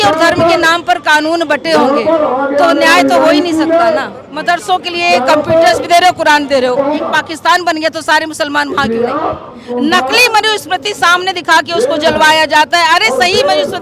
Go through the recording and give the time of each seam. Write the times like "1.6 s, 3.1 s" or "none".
4.3 s, 7.1 s, 9.6 s